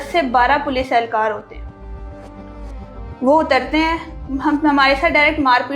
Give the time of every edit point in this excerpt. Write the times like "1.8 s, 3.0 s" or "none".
none